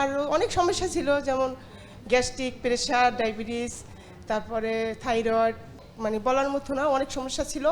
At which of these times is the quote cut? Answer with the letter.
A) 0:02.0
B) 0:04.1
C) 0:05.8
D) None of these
C